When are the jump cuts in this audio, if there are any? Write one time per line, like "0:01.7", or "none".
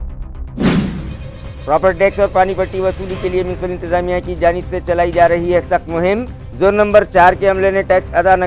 0:01.1